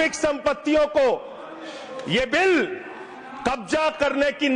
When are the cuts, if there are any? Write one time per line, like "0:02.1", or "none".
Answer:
none